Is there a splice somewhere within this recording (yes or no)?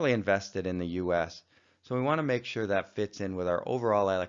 yes